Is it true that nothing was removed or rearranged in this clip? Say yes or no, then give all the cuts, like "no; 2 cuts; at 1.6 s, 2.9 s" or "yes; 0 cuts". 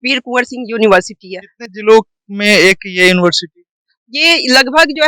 yes; 0 cuts